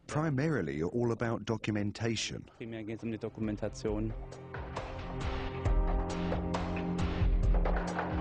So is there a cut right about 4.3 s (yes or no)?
no